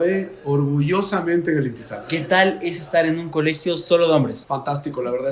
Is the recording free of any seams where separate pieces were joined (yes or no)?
no